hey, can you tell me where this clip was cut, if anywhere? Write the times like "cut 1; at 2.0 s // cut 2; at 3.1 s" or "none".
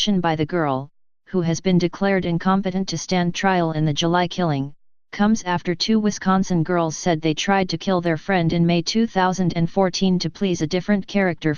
cut 1; at 9.1 s